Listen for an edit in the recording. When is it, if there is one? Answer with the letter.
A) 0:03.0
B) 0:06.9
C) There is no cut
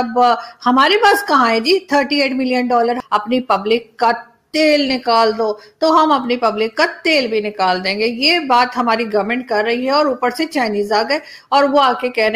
A